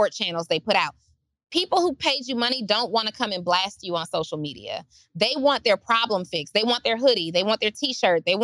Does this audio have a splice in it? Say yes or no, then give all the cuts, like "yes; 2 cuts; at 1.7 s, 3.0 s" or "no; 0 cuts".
yes; 1 cut; at 3.5 s